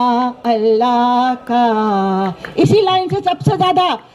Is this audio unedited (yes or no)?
yes